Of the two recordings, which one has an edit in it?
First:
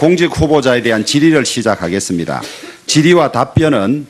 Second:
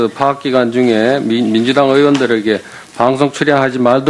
first; 1 cut; at 1.6 s

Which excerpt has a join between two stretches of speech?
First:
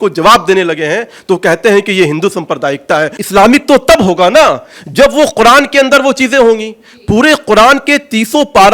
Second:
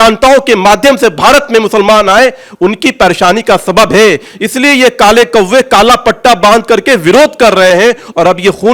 first; 1 cut; at 3.2 s

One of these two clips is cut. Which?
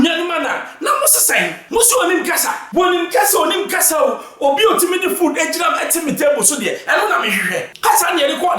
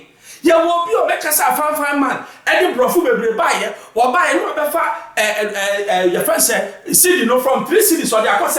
first; 3 cuts; at 1.6 s, 2.6 s, 7.7 s

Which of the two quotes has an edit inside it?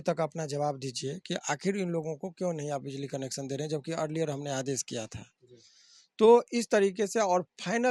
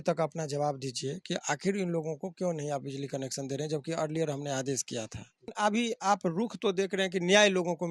second; 1 cut; at 5.5 s

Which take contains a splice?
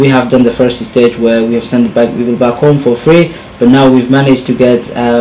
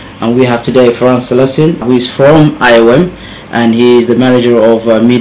first; 1 cut; at 3.3 s

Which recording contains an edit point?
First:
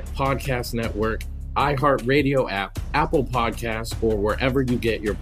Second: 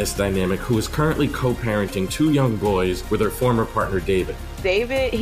first; 1 cut; at 1.2 s

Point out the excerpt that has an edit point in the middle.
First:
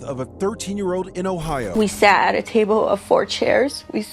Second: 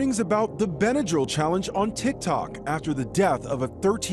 first; 1 cut; at 1.7 s

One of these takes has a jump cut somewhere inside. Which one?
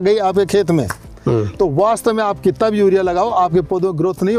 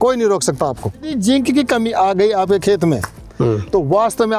second; 1 cut; at 1.1 s

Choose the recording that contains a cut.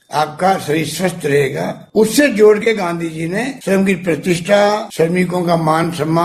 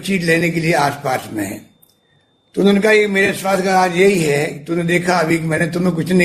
first; 3 cuts; at 1.8 s, 3.6 s, 4.9 s

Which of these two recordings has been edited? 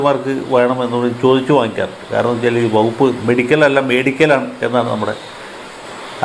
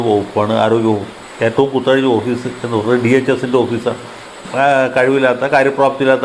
second; 1 cut; at 4.5 s

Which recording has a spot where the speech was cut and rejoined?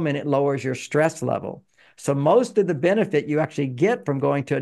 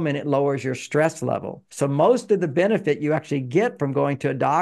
second; 1 cut; at 1.6 s

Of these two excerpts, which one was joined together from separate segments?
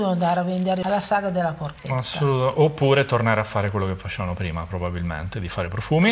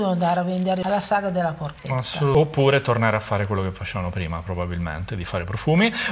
second; 1 cut; at 2.3 s

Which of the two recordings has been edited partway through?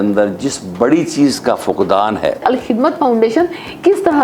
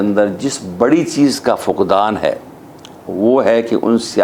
first; 1 cut; at 2.4 s

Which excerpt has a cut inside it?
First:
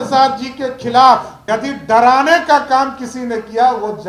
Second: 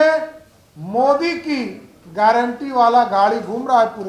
first; 1 cut; at 1.3 s

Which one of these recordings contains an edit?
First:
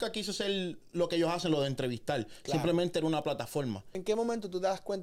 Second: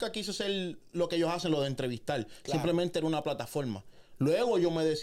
first; 1 cut; at 3.9 s

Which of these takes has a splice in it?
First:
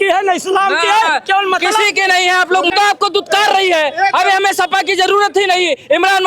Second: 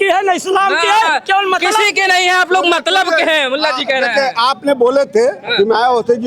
first; 1 cut; at 2.7 s

